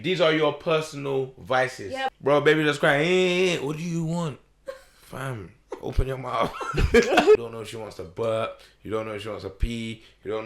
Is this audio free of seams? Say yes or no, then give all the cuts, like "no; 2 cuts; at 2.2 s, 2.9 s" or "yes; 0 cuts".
no; 2 cuts; at 2.0 s, 7.4 s